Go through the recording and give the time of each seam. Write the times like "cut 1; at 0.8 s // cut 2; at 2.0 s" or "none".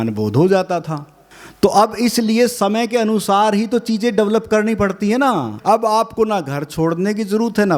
cut 1; at 5.5 s

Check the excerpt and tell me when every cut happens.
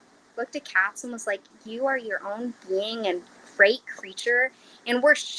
none

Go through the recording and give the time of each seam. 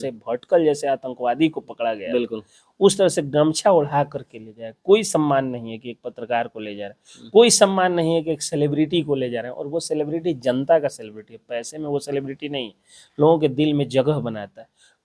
none

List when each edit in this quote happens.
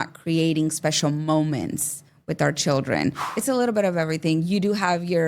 cut 1; at 3.3 s

